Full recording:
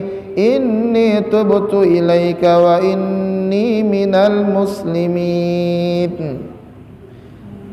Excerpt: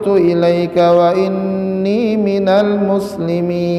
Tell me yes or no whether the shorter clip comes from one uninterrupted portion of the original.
yes